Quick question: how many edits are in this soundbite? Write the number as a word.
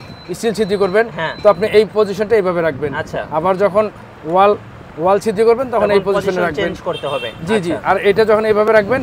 zero